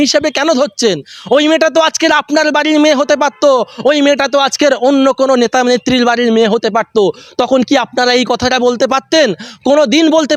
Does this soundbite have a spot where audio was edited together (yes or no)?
no